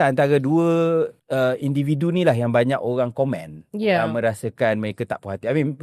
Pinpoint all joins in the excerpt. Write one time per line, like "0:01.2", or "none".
0:01.2